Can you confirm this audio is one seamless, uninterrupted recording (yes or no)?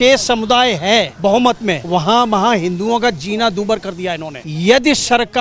no